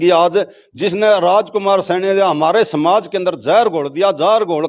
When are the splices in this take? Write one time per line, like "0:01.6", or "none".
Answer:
none